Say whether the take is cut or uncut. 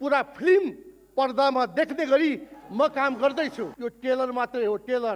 cut